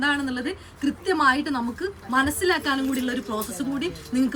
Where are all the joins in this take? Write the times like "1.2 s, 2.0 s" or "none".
none